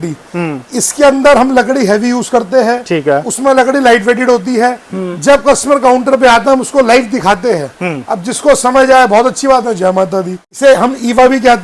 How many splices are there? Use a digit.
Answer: 1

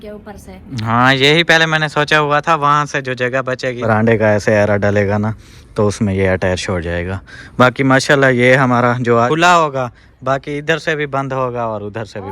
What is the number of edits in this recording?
2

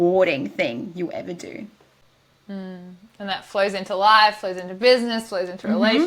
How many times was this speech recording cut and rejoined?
0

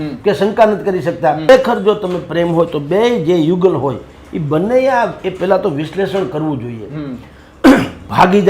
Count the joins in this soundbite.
1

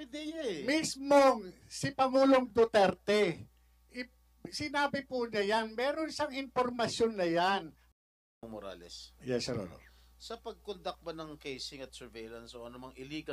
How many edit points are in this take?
1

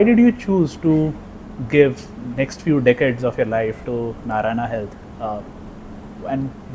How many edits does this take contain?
0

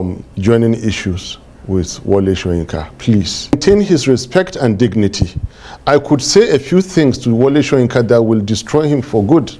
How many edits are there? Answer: 1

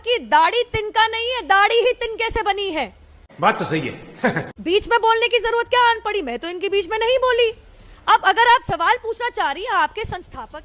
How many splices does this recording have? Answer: 0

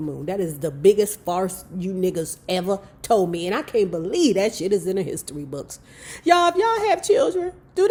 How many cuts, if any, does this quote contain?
0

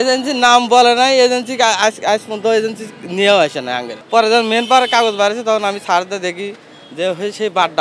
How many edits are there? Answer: 1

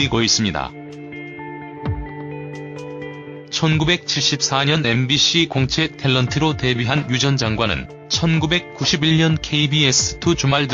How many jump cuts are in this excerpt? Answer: 0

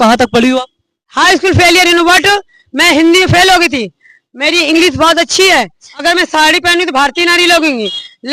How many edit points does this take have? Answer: 1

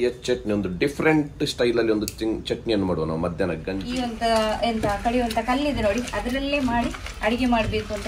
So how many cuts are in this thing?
1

